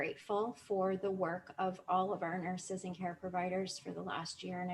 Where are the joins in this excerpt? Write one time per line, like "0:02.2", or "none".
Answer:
none